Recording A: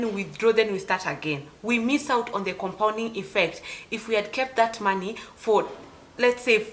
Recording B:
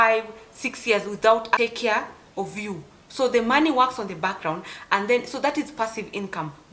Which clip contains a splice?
B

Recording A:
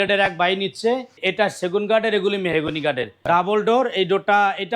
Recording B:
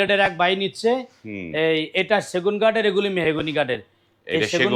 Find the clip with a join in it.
A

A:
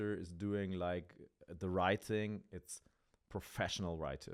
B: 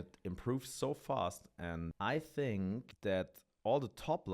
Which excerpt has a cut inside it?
B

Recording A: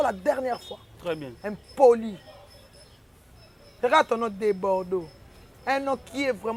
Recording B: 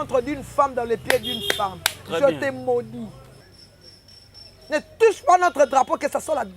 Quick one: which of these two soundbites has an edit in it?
B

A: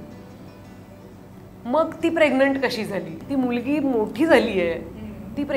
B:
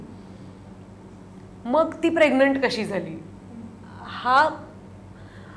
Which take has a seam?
A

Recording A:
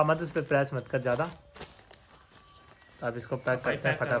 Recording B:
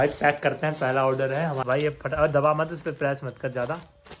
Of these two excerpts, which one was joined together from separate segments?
B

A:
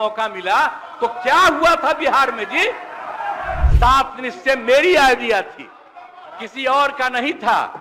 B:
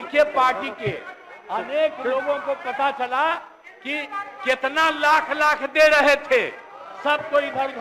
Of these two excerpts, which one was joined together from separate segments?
A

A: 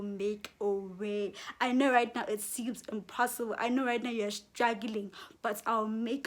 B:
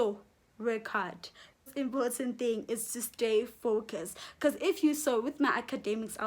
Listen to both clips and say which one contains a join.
B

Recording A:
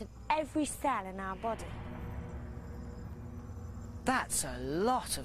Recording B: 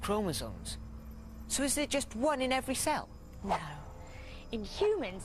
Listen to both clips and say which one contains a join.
A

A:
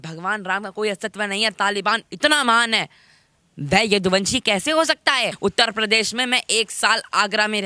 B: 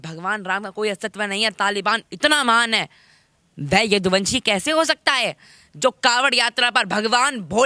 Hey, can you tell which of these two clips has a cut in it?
A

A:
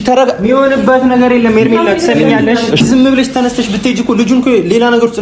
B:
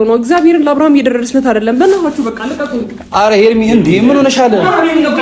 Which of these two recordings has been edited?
A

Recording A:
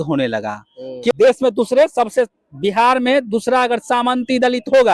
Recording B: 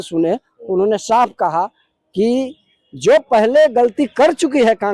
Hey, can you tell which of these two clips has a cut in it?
A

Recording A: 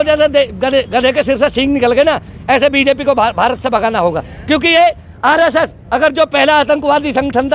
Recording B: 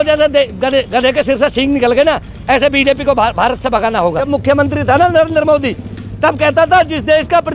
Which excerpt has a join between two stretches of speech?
B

